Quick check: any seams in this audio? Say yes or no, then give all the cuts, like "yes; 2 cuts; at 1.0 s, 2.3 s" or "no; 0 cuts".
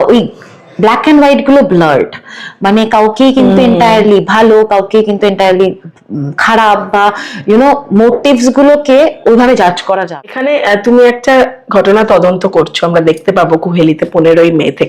yes; 1 cut; at 10.1 s